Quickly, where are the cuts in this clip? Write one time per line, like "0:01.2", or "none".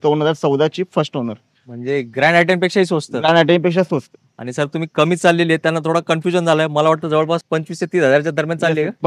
none